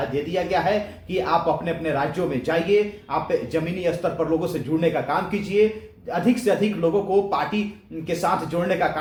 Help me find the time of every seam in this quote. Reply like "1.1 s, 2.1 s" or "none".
none